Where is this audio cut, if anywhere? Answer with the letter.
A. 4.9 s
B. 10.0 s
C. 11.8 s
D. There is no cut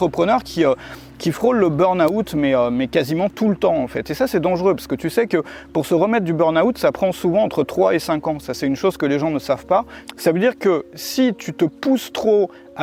B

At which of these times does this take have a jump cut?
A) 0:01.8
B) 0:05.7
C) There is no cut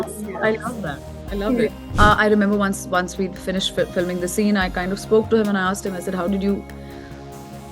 A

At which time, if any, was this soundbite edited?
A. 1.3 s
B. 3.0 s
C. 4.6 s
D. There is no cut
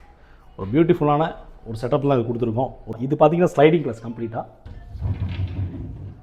B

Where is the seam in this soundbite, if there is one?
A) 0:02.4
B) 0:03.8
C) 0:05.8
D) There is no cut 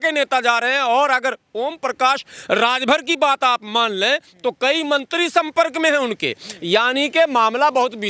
D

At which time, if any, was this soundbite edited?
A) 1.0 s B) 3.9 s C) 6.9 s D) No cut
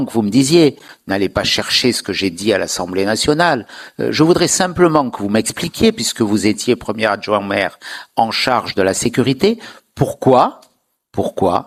D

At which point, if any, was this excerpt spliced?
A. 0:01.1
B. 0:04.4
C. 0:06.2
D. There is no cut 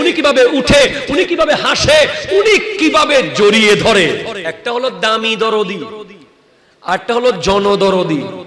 B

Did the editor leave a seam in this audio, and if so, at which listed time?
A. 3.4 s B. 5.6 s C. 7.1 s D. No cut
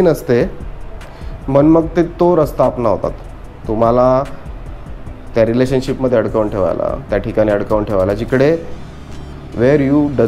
D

